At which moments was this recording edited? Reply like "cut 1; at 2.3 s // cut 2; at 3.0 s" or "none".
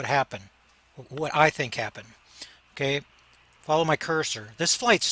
cut 1; at 1.7 s

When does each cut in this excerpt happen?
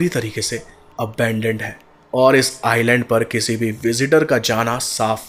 none

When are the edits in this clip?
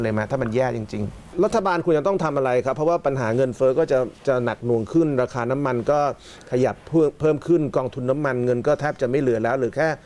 cut 1; at 1.3 s

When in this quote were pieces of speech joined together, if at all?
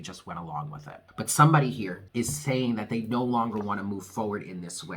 cut 1; at 1.0 s // cut 2; at 2.0 s

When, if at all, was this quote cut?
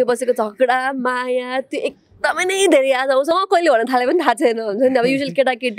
cut 1; at 3.3 s

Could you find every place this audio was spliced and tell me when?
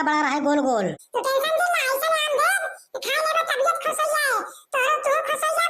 cut 1; at 1.0 s

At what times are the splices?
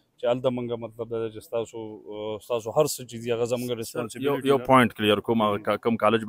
none

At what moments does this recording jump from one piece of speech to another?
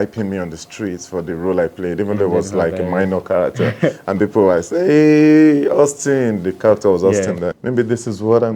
cut 1; at 7.5 s

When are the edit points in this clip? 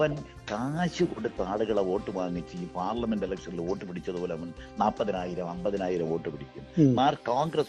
none

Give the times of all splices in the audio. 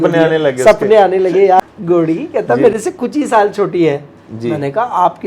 cut 1; at 1.6 s

